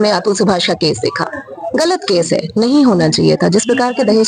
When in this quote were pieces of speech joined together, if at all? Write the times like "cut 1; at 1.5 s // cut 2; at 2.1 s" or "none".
none